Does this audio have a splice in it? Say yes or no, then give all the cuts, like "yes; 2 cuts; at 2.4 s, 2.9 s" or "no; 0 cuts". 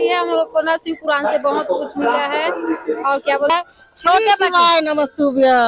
yes; 1 cut; at 3.5 s